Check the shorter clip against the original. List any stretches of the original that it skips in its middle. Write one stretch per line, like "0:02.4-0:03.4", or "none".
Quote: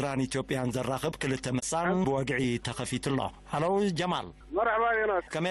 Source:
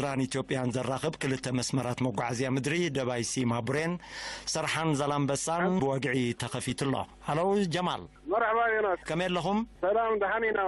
0:01.7-0:05.4